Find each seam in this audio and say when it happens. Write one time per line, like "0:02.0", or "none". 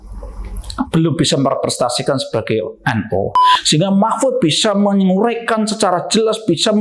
0:03.5